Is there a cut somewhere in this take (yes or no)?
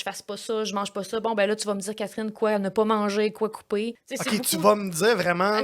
yes